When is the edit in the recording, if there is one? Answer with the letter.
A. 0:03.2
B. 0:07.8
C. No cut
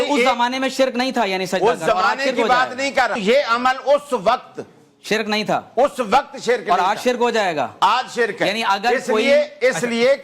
A